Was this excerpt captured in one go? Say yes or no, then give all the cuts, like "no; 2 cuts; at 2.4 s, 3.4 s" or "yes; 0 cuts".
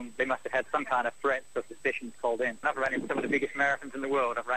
no; 1 cut; at 2.6 s